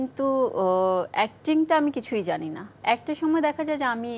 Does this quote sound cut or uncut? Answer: cut